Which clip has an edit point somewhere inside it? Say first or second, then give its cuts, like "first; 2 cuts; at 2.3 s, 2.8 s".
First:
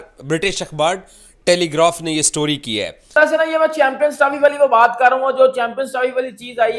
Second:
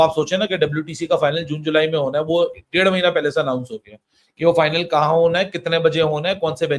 first; 1 cut; at 3.0 s